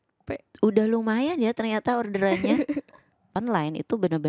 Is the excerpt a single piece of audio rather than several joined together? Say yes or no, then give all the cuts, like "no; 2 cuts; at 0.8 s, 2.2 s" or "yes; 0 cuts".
no; 1 cut; at 3.4 s